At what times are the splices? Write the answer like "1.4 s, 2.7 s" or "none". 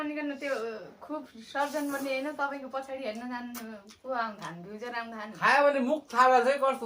5.3 s